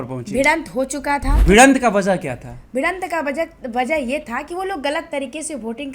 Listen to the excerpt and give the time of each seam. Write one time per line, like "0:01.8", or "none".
0:01.4